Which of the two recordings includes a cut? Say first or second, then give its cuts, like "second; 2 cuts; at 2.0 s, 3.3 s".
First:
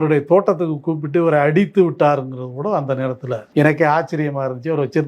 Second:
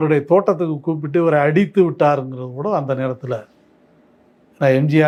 first; 1 cut; at 3.4 s